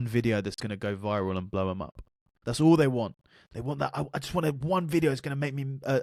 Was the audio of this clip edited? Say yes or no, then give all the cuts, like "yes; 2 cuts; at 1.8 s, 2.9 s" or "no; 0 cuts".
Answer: no; 0 cuts